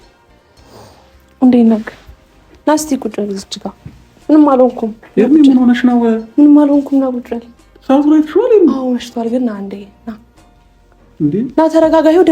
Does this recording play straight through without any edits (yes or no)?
no